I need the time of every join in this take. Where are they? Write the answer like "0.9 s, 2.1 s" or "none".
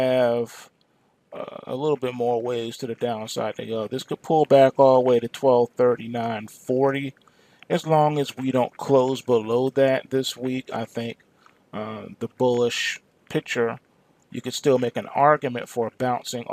3.6 s